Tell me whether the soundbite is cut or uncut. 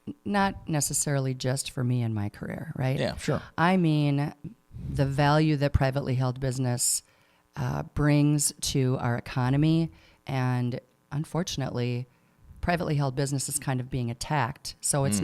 cut